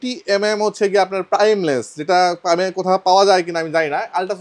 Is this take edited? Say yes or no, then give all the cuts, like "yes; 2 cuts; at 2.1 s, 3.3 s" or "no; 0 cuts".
no; 0 cuts